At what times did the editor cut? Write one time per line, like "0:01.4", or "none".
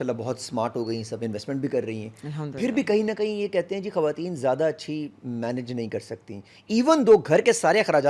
none